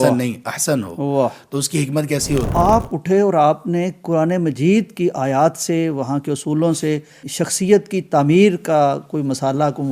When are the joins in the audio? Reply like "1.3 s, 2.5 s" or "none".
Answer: 2.5 s

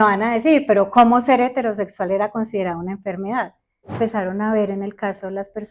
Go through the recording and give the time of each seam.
3.9 s

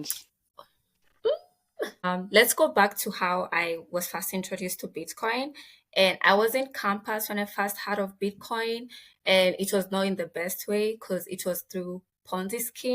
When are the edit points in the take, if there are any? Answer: 2.0 s

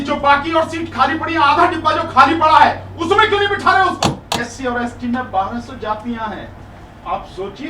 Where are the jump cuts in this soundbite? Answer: 4.2 s

